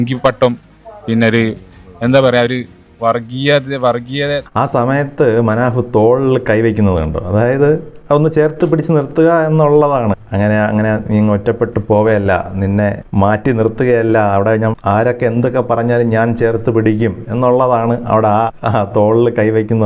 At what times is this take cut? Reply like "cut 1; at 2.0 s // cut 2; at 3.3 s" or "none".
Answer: none